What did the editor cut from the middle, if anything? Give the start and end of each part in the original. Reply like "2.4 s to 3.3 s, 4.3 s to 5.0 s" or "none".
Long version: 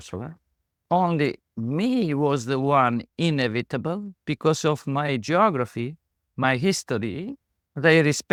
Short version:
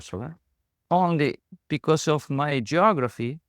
1.5 s to 4.1 s